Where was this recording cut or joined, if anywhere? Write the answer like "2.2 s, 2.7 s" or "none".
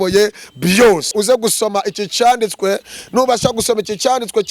1.1 s